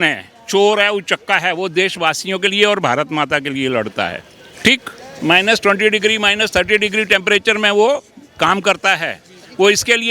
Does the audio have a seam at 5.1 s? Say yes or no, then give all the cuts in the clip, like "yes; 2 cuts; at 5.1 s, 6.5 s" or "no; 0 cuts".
yes; 1 cut; at 5.1 s